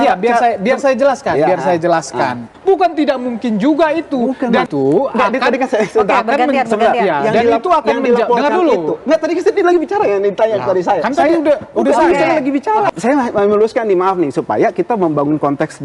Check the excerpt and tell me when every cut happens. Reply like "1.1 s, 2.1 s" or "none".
2.5 s, 4.7 s, 12.9 s